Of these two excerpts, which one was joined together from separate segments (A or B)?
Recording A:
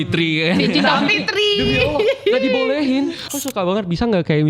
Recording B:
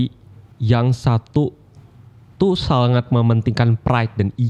A